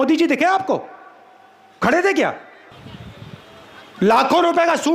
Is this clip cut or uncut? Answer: cut